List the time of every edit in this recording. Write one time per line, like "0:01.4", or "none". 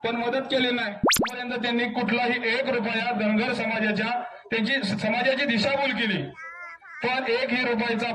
0:01.4